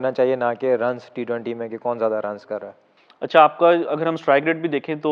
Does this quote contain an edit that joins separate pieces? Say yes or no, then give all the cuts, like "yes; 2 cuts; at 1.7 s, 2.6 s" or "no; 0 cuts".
no; 0 cuts